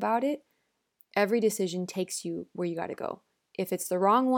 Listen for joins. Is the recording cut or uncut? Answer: uncut